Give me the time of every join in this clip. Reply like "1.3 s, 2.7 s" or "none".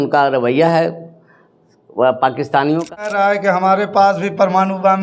3.1 s